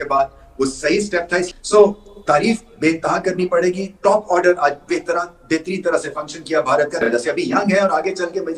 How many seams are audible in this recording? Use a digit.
2